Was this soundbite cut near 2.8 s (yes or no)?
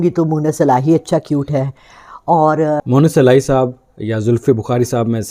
yes